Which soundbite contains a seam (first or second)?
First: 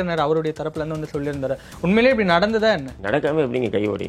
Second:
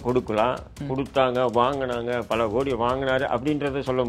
first